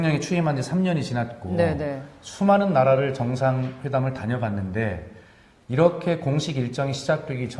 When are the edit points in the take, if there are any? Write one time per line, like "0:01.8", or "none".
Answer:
none